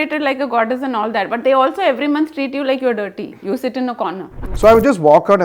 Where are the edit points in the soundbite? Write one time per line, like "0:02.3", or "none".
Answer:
0:04.6